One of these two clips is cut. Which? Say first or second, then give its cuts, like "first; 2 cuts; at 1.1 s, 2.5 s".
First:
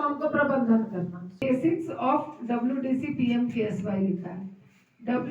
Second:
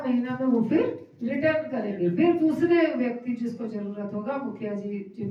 first; 1 cut; at 1.3 s